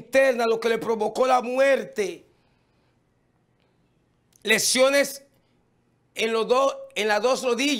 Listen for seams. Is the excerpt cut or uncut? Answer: uncut